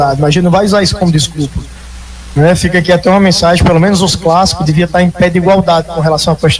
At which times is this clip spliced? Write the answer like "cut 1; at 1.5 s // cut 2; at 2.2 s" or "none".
none